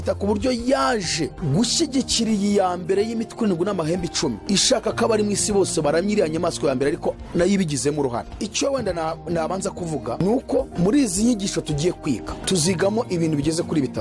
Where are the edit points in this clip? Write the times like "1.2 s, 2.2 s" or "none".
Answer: none